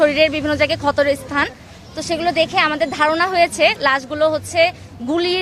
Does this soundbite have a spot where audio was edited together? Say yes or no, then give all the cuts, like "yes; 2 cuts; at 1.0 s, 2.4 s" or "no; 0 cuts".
no; 0 cuts